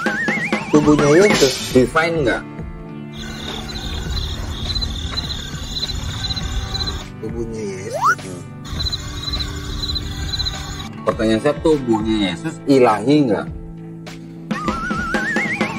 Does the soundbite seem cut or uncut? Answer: uncut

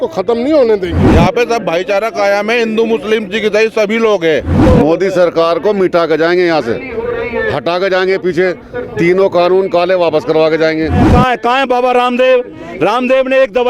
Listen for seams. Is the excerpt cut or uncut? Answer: cut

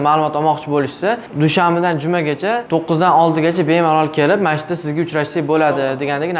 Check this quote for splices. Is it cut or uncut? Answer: cut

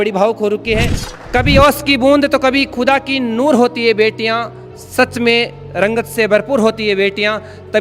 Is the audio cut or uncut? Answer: cut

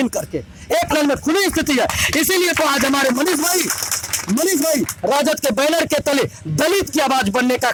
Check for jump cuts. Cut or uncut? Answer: uncut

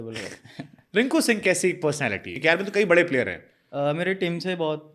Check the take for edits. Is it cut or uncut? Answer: cut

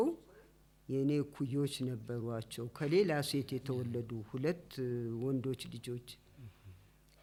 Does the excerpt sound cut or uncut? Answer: uncut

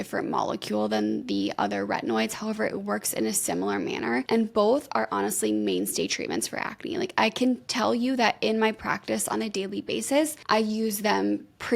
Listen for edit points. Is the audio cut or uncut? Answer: cut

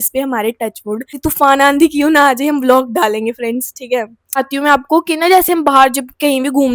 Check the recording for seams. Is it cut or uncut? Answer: cut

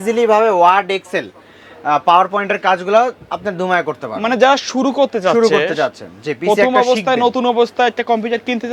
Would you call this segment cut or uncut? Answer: uncut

